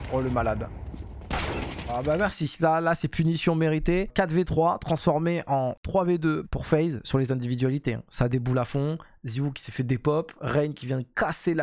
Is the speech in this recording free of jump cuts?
yes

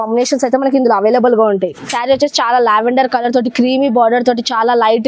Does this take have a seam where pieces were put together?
yes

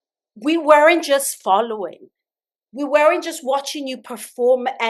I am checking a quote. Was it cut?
no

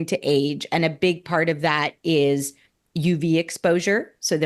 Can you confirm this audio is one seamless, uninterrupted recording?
yes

